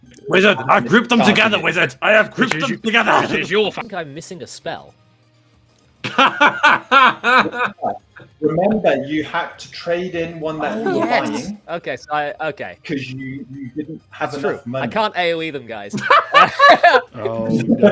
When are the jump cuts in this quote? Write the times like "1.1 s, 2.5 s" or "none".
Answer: 3.9 s